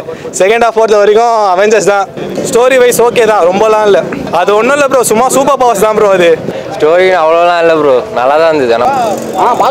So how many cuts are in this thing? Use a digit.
3